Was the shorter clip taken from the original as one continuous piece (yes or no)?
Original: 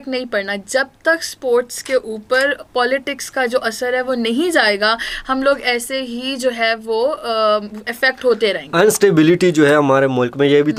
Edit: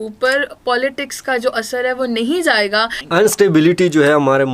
no